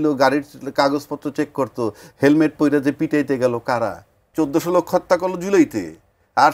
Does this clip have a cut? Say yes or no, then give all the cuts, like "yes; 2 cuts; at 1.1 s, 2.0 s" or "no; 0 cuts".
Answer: yes; 1 cut; at 4.2 s